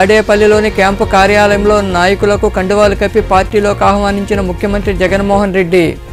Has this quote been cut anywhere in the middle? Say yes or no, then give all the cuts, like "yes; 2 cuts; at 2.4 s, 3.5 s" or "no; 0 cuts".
no; 0 cuts